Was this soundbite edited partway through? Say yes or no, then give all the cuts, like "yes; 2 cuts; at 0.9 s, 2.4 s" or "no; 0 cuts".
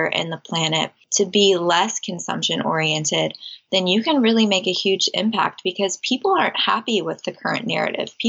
yes; 1 cut; at 1.0 s